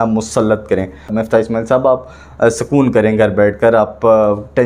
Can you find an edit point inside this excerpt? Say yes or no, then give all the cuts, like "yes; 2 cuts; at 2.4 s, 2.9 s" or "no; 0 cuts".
yes; 1 cut; at 1.1 s